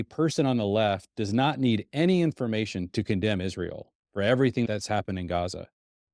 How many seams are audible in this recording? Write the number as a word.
two